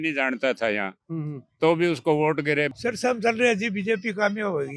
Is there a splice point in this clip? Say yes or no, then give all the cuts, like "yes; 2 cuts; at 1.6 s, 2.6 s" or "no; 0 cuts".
yes; 1 cut; at 2.7 s